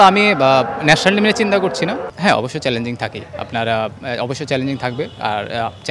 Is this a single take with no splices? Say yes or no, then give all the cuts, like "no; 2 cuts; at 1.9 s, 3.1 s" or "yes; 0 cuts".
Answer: no; 1 cut; at 2.0 s